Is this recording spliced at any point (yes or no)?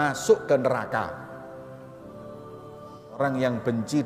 yes